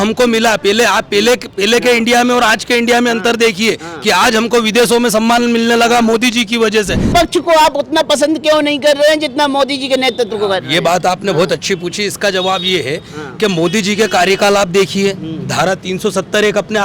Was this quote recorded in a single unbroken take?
no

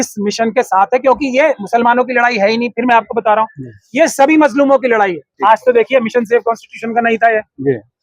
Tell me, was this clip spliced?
yes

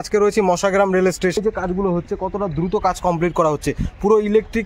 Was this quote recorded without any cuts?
no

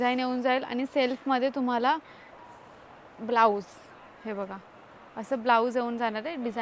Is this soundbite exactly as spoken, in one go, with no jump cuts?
yes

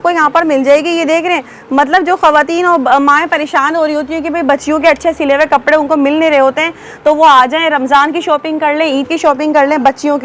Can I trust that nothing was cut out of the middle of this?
yes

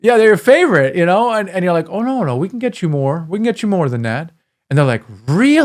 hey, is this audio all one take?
yes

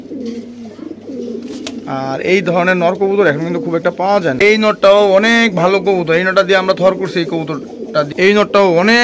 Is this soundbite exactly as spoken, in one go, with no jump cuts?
no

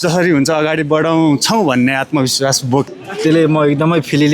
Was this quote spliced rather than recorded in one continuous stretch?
yes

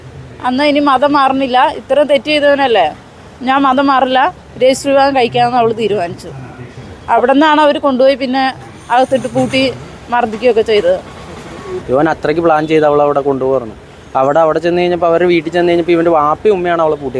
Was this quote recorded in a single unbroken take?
no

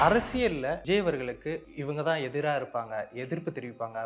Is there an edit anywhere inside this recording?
yes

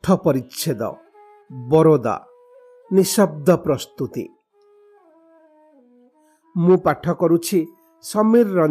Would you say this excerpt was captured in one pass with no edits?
no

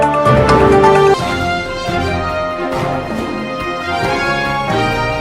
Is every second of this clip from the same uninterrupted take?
no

